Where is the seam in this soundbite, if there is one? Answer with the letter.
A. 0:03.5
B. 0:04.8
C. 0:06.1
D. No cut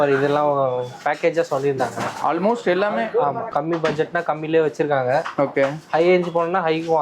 A